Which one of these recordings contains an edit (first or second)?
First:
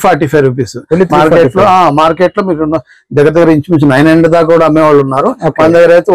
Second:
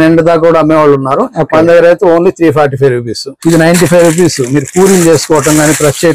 second